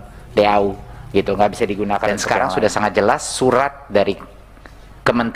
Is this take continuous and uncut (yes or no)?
no